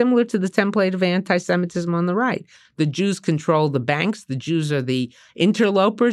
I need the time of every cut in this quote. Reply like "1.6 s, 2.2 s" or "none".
none